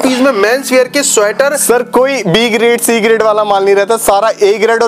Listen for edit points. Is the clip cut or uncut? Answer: uncut